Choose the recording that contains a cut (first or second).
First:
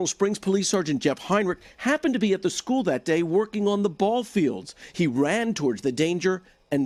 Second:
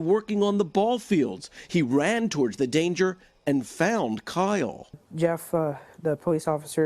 second